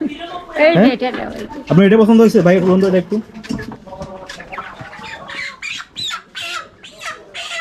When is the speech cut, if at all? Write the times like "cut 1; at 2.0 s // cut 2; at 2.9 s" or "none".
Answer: none